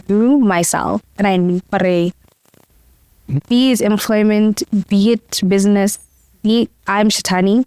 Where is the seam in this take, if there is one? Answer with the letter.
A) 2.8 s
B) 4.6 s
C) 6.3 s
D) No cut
D